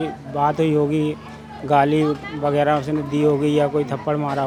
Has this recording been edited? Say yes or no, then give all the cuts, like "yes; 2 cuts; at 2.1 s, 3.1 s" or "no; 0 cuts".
no; 0 cuts